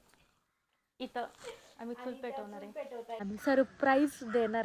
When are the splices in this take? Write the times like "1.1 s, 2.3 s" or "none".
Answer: 3.2 s